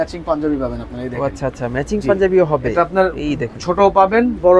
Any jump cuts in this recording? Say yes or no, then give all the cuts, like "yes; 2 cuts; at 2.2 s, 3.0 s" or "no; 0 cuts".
no; 0 cuts